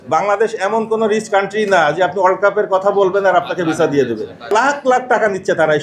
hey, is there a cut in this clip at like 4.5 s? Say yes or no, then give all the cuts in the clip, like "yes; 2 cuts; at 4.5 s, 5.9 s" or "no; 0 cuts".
yes; 1 cut; at 4.5 s